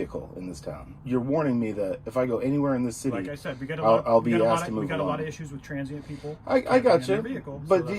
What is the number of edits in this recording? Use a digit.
1